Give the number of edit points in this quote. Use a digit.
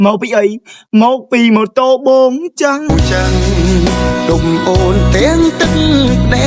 1